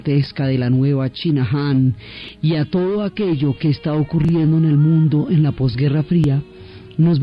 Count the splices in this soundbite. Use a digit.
0